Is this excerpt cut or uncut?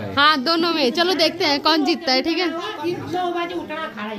uncut